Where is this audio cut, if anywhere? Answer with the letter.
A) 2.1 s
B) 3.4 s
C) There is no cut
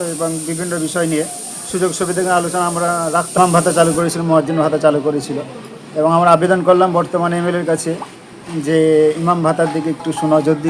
B